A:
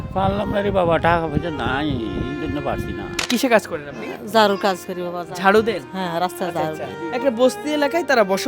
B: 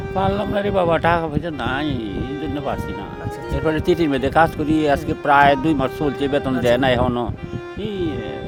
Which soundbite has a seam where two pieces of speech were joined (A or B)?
A